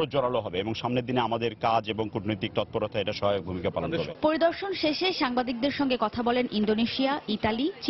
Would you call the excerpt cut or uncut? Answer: uncut